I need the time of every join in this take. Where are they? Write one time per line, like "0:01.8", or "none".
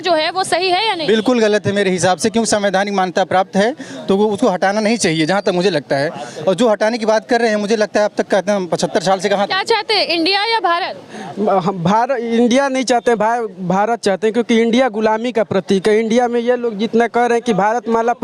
none